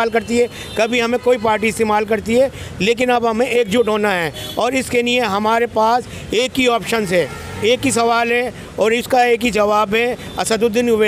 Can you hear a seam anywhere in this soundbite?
no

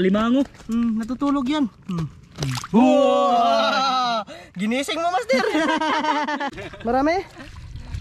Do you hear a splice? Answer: yes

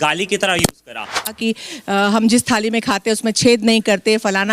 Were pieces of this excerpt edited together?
yes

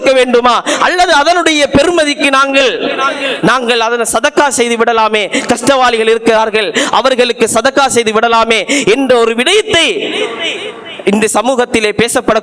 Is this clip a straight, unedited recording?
yes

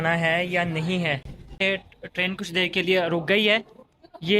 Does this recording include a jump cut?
yes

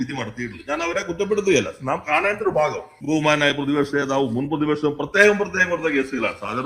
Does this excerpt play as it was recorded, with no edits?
no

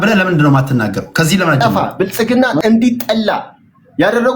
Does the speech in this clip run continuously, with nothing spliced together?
no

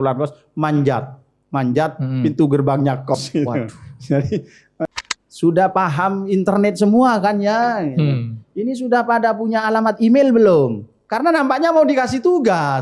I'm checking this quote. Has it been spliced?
yes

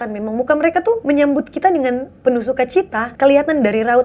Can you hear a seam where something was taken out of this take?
yes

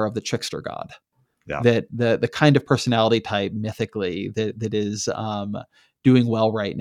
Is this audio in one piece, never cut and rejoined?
yes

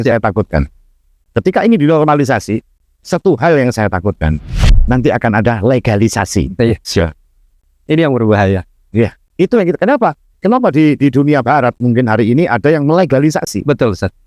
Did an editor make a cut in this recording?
yes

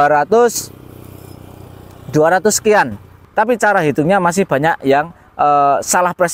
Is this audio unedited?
no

